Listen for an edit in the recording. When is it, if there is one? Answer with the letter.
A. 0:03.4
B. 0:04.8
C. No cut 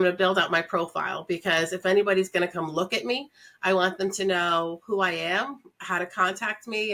C